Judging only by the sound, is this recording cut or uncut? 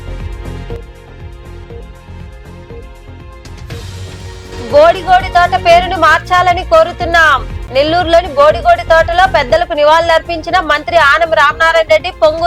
uncut